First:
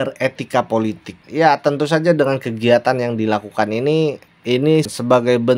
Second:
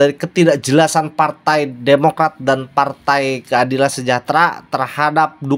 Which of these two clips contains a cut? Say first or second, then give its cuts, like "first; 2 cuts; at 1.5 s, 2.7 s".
first; 1 cut; at 1.1 s